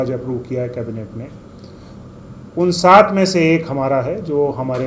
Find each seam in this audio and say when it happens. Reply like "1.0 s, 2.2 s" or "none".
none